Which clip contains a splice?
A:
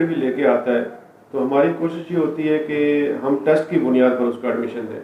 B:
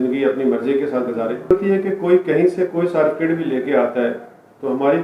B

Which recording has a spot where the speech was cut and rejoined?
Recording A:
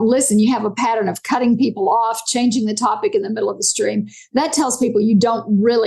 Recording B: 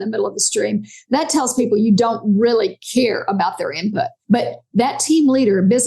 B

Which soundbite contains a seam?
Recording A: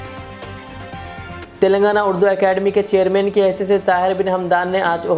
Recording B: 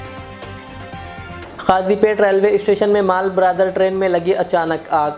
B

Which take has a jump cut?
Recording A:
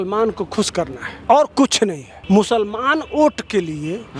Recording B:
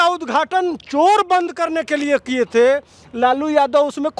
A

